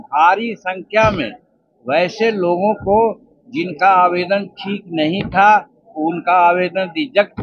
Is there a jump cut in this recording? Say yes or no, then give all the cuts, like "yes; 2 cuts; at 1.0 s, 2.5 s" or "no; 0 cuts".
no; 0 cuts